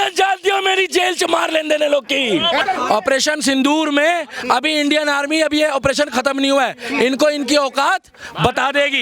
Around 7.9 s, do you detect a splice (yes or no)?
no